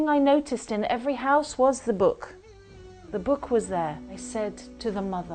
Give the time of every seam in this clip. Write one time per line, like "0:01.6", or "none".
0:04.1